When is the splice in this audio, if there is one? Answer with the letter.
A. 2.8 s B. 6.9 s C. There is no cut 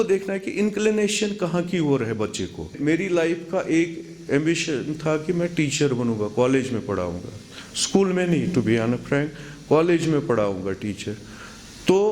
A